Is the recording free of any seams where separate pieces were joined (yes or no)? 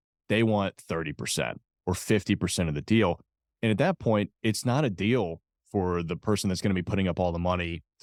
yes